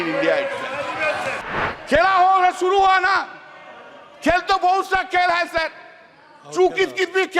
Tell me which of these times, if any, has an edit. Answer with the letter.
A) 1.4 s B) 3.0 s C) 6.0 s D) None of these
A